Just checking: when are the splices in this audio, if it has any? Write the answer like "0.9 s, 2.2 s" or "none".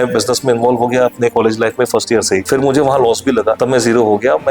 2.4 s, 3.6 s